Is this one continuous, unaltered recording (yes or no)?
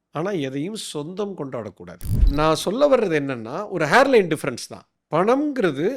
no